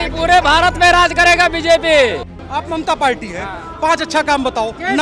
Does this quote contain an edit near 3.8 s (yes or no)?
no